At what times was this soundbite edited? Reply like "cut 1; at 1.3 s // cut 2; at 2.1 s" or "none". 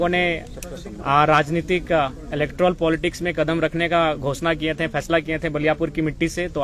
none